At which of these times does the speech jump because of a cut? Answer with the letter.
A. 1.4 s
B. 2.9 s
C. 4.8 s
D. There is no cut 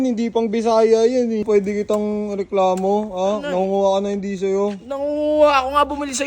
A